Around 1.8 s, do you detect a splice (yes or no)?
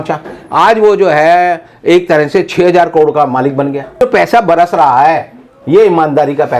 no